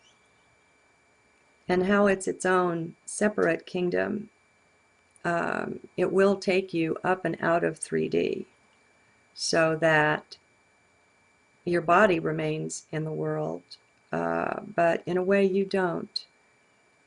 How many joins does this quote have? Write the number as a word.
one